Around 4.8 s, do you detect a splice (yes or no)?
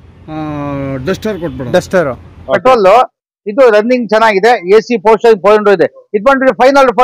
no